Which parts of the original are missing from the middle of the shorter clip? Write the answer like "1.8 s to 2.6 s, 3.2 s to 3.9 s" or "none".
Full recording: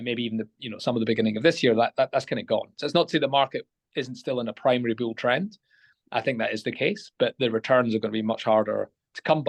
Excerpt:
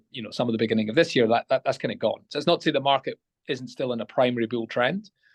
none